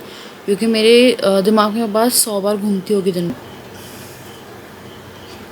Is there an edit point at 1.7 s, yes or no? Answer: no